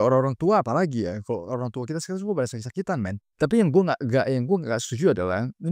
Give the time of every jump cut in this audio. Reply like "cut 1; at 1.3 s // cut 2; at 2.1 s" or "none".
cut 1; at 3.2 s